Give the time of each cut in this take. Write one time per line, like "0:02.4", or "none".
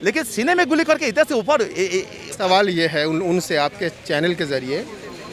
0:02.4

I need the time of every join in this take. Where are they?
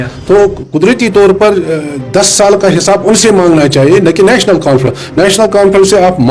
none

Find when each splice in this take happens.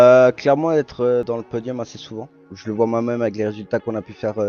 0:01.3
0:02.4

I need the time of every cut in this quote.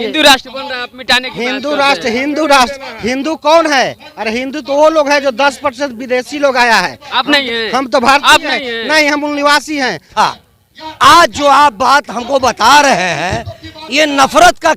0:10.1

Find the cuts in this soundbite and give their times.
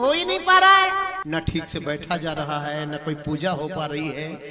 0:01.2

